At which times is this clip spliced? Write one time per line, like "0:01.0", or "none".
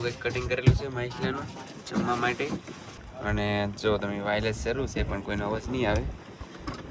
none